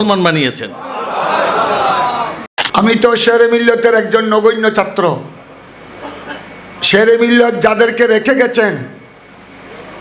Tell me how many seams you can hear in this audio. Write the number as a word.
one